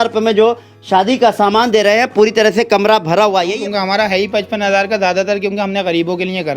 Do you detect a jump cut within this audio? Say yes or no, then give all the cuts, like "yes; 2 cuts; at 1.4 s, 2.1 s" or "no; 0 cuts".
yes; 1 cut; at 3.5 s